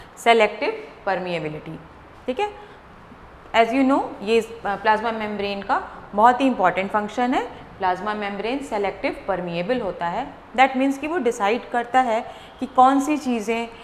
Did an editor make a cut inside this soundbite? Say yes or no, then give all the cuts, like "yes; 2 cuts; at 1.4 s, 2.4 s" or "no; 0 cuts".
no; 0 cuts